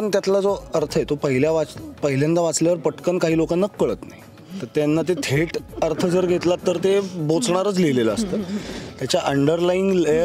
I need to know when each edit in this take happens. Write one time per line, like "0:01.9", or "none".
none